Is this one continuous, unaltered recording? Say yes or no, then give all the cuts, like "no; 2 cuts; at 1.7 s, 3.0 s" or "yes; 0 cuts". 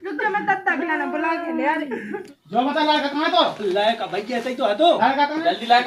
no; 1 cut; at 2.2 s